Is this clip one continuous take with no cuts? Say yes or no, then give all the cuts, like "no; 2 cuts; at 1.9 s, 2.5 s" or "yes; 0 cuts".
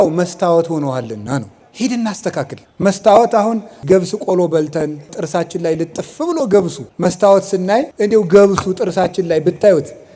no; 6 cuts; at 1.6 s, 2.6 s, 3.8 s, 5.2 s, 6.8 s, 7.9 s